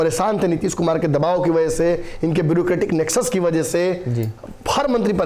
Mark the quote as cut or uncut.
uncut